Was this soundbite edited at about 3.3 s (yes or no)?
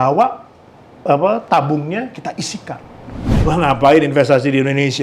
yes